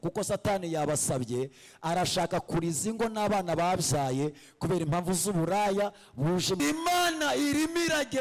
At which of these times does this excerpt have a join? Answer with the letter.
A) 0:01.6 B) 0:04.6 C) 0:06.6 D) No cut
C